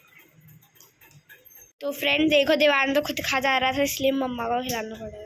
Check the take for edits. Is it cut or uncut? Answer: cut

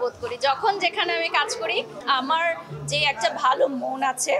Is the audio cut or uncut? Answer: cut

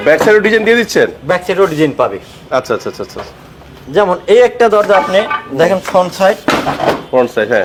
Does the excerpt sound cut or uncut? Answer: uncut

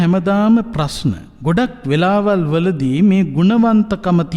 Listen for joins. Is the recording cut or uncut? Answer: cut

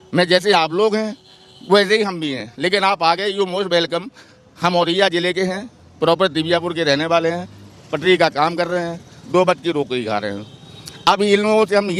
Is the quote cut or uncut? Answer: uncut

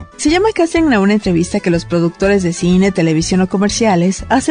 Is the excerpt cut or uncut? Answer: uncut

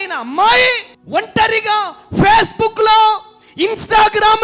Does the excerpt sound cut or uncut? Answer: cut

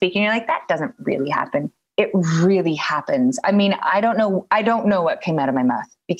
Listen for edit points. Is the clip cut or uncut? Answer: uncut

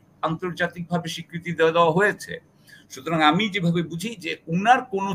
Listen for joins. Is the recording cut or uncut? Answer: uncut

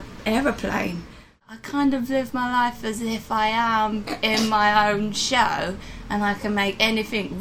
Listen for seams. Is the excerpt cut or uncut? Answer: cut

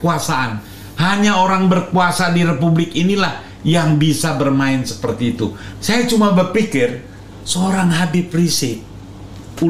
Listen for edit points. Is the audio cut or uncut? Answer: cut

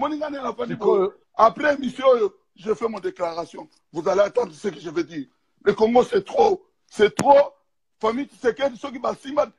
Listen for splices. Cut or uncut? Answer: uncut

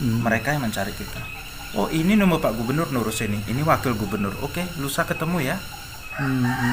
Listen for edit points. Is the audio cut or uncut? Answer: uncut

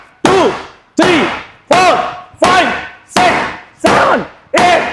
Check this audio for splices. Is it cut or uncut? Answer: uncut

